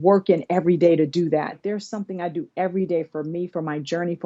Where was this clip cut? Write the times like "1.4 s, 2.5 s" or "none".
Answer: 1.6 s